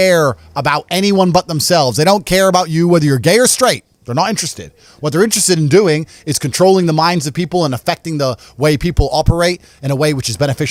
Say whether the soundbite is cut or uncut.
uncut